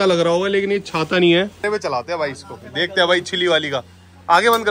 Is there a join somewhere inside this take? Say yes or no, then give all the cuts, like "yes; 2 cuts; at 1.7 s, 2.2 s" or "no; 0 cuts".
yes; 1 cut; at 1.6 s